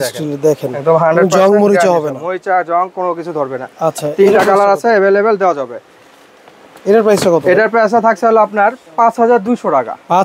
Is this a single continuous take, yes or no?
yes